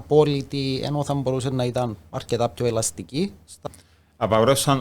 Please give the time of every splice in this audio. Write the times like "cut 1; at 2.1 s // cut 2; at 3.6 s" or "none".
cut 1; at 3.6 s